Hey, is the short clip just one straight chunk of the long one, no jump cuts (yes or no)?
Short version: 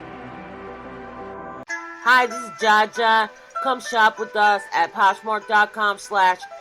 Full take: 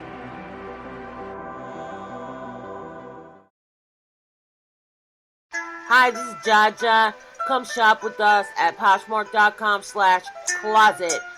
no